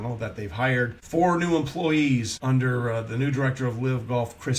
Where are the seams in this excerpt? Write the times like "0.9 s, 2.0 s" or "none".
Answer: 1.0 s, 2.3 s